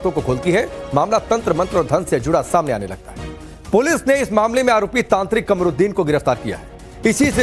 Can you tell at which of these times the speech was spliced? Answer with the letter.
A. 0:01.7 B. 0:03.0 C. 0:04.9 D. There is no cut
C